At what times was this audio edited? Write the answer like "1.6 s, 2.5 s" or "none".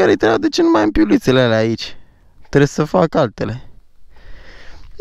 none